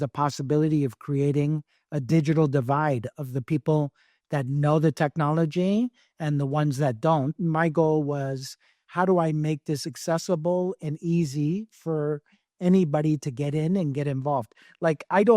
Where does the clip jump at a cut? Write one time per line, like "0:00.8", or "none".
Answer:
0:07.4